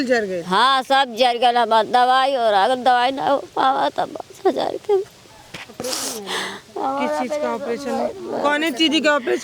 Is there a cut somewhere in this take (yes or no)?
no